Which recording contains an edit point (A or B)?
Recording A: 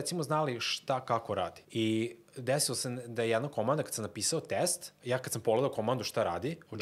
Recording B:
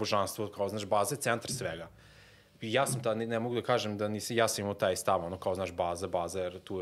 A